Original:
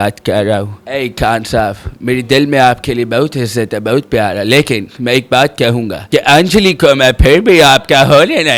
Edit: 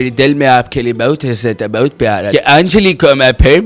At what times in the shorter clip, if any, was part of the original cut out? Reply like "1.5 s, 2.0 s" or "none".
2.2 s